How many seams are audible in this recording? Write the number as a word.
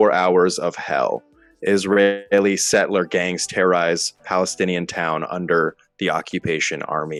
zero